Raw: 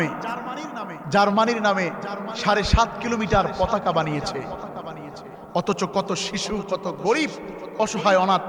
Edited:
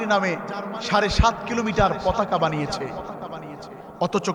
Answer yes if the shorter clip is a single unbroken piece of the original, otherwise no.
yes